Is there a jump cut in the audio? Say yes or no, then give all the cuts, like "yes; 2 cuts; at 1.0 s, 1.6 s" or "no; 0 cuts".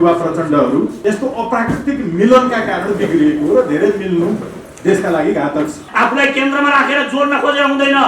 yes; 2 cuts; at 1.0 s, 5.9 s